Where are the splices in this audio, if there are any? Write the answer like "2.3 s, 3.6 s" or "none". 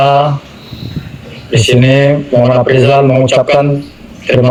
none